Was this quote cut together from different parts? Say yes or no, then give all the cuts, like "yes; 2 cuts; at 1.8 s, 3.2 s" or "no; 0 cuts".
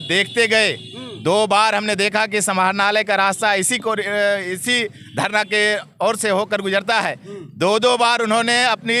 no; 0 cuts